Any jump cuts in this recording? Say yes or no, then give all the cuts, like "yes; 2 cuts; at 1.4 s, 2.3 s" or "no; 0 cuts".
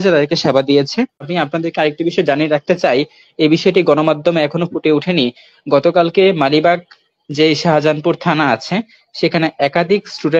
yes; 1 cut; at 1.3 s